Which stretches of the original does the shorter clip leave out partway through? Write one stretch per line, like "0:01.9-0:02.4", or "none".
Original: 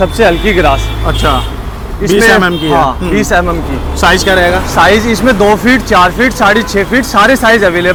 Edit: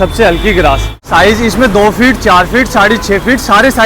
0:01.0-0:04.7